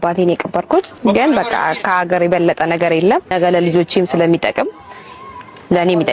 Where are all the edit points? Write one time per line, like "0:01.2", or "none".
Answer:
0:00.9
0:03.3